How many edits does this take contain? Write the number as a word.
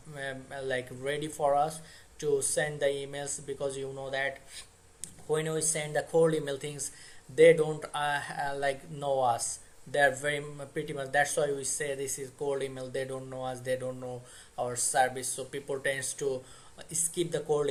zero